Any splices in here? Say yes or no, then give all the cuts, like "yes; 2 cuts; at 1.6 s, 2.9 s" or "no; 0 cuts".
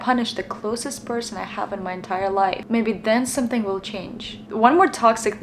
no; 0 cuts